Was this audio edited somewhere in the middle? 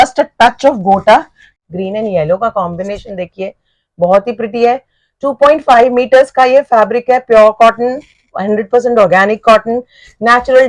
yes; 1 cut; at 1.6 s

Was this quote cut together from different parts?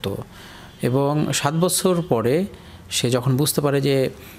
no; 0 cuts

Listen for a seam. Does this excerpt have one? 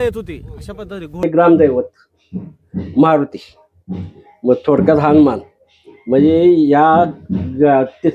yes; 1 cut; at 1.2 s

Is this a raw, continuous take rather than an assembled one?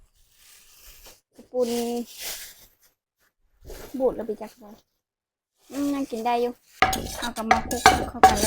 no; 1 cut; at 6.6 s

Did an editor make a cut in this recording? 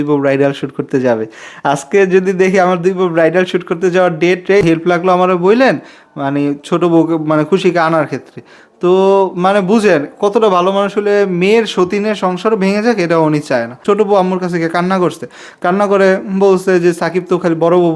yes; 2 cuts; at 4.6 s, 13.8 s

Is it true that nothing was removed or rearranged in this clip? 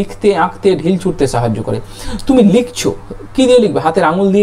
yes; 0 cuts

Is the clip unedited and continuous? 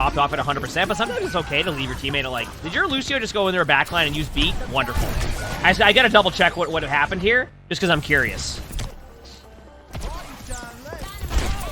yes; 0 cuts

